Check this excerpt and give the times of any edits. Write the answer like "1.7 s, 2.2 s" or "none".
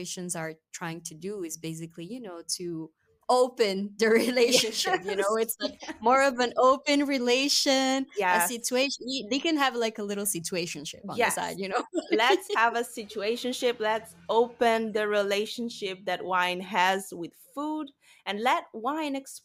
none